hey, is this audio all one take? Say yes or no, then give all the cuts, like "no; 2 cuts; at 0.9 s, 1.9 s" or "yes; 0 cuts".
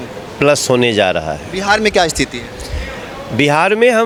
yes; 0 cuts